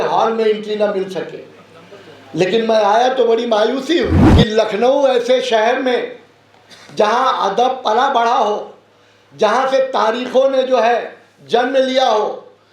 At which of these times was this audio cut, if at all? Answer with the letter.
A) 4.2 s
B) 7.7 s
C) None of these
A